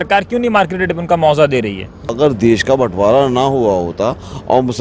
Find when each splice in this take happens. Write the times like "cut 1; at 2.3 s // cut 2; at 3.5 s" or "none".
cut 1; at 2.1 s